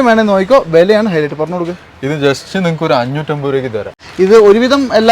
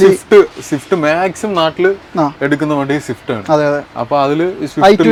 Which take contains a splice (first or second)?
first